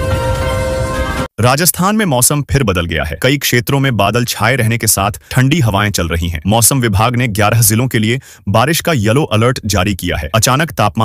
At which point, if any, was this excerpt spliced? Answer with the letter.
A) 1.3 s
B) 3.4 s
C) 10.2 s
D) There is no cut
A